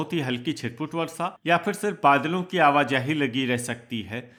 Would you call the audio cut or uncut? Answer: uncut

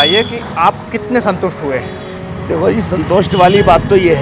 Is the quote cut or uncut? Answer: uncut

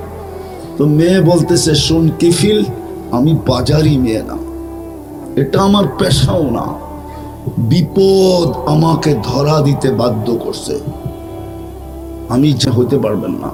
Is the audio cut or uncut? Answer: uncut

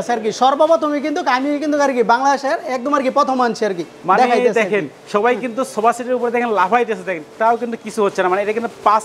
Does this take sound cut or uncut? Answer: uncut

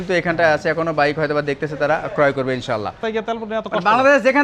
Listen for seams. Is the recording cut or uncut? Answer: cut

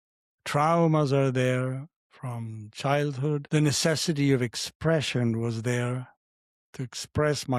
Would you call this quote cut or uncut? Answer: cut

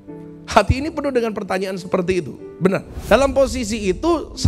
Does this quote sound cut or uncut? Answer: cut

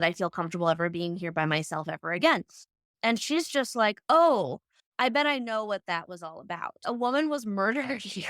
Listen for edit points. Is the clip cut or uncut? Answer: cut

